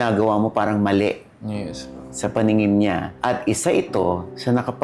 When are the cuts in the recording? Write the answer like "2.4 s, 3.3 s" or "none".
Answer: none